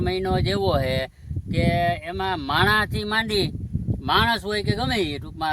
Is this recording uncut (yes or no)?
yes